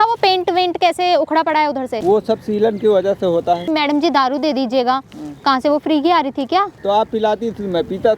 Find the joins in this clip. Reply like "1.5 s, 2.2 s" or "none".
1.9 s, 3.6 s, 6.7 s